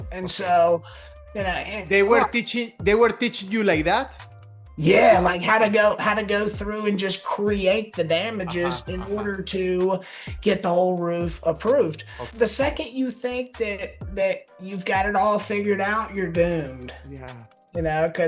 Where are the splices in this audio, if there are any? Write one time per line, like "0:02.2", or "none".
0:12.3